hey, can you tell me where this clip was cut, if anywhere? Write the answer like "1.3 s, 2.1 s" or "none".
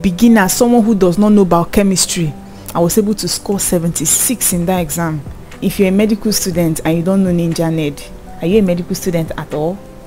5.5 s